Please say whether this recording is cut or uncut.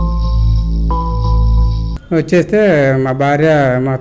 cut